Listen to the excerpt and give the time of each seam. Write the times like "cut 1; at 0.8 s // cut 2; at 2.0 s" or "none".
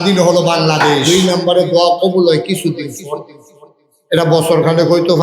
cut 1; at 1.0 s